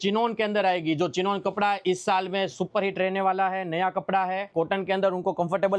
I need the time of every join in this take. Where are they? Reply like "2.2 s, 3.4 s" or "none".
4.5 s